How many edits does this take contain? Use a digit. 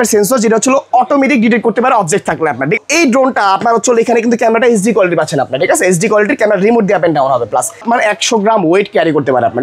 2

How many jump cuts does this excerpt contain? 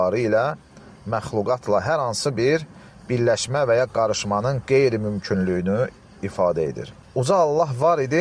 1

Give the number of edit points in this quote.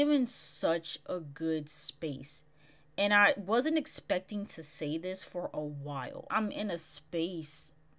1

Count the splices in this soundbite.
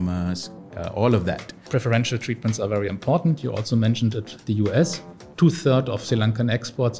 1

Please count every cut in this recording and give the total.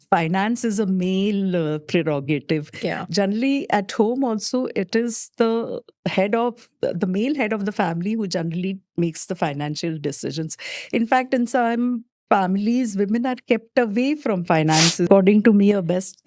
1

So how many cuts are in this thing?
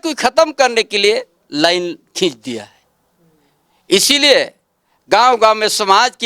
0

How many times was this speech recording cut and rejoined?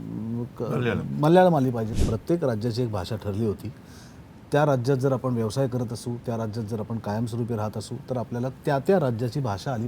1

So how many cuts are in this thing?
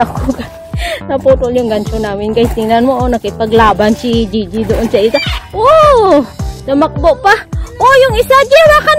0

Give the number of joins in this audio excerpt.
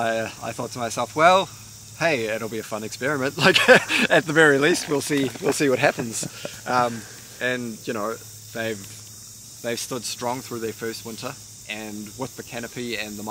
0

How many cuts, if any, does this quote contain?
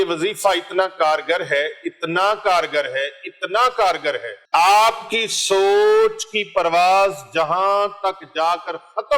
1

